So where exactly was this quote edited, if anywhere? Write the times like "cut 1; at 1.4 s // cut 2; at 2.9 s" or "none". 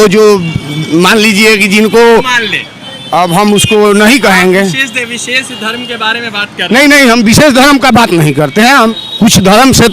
cut 1; at 8.9 s